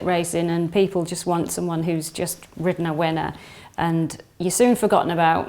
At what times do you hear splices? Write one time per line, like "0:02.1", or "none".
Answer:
none